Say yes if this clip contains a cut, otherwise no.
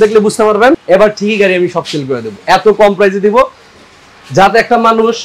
no